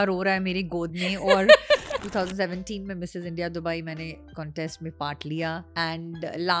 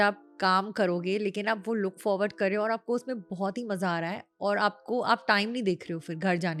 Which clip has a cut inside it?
first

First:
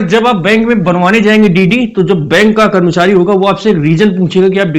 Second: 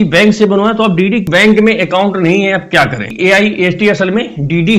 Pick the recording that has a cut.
second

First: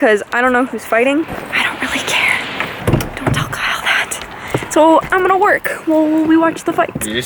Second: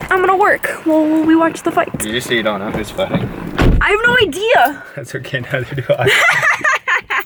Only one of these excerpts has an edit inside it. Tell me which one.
first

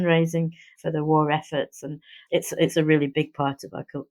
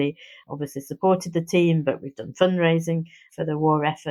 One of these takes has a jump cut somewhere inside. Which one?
first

